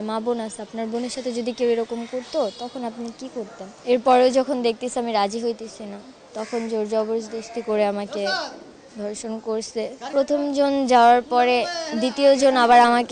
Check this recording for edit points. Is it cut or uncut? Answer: cut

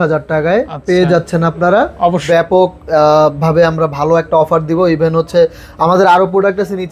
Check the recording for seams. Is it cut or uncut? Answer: cut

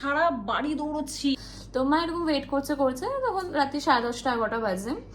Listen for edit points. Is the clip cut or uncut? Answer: cut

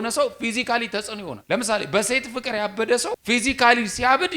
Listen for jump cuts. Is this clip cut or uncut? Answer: cut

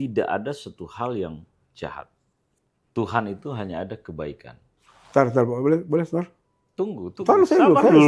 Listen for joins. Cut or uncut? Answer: uncut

